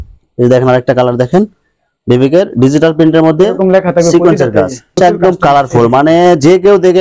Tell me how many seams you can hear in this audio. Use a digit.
1